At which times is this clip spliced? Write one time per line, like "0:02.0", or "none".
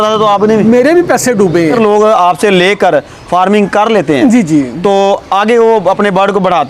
0:01.8